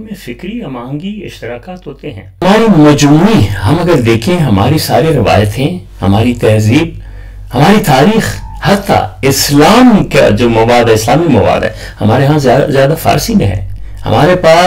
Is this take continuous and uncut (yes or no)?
no